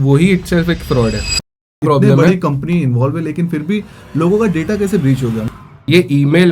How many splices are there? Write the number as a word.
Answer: two